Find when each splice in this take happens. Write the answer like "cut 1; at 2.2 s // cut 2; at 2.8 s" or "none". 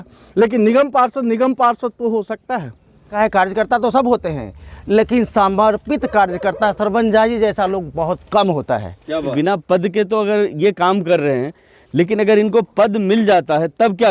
cut 1; at 3.1 s // cut 2; at 9.3 s

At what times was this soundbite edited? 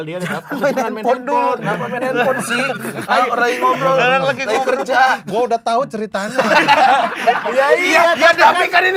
none

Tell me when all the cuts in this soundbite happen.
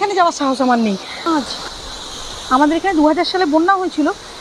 cut 1; at 1.3 s

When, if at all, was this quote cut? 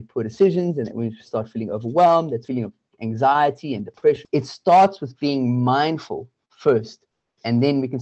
cut 1; at 2.5 s // cut 2; at 4.2 s

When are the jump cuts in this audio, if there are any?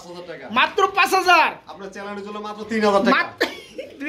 none

